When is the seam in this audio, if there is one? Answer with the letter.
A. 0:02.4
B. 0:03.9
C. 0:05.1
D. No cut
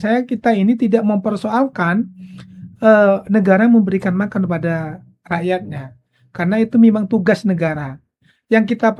D